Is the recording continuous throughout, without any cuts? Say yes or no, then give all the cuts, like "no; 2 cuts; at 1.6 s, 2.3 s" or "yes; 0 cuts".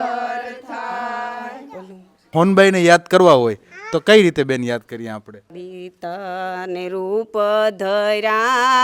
no; 2 cuts; at 2.2 s, 5.5 s